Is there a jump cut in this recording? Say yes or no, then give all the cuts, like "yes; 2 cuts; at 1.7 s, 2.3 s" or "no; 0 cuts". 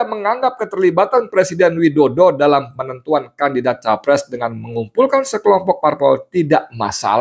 no; 0 cuts